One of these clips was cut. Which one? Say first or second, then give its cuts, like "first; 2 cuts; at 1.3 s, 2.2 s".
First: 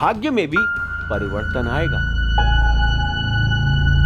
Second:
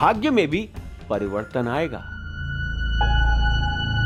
first; 1 cut; at 2.1 s